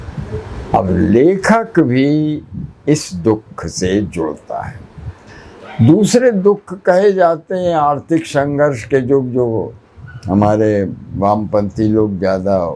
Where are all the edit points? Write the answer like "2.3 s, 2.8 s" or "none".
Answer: none